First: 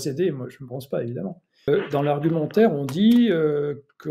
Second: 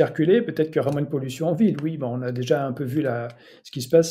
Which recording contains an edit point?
first; 1 cut; at 1.7 s

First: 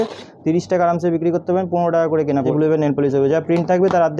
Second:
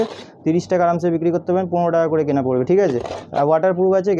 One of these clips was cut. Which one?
first; 1 cut; at 2.5 s

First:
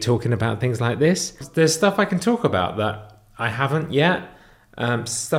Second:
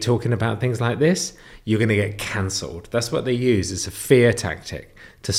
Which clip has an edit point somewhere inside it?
first; 1 cut; at 1.4 s

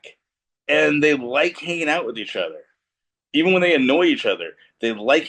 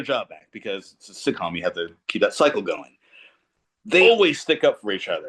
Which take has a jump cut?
second; 1 cut; at 4.0 s

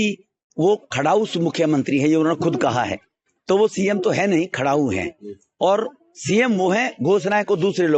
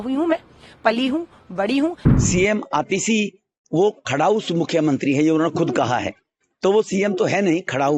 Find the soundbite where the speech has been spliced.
second; 1 cut; at 2.0 s

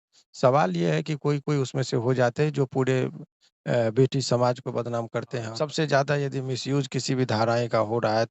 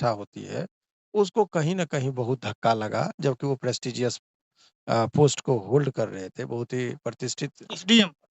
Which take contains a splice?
first; 1 cut; at 5.5 s

